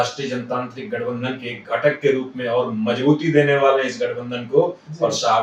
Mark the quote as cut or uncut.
uncut